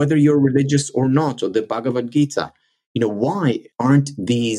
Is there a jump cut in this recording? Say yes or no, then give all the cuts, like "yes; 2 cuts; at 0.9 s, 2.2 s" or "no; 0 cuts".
yes; 1 cut; at 3.7 s